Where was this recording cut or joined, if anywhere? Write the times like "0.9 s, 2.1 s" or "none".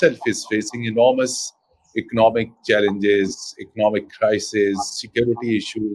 none